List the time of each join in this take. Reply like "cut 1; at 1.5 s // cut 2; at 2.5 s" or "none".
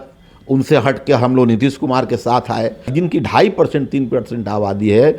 cut 1; at 2.9 s